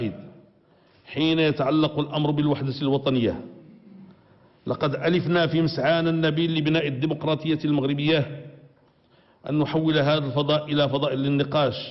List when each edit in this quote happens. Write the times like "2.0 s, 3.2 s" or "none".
6.4 s